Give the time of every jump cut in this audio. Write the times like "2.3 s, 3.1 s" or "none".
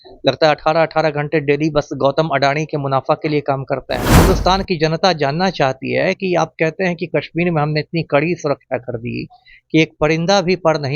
4.1 s